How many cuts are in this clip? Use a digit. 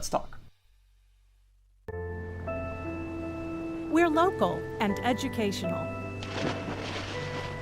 1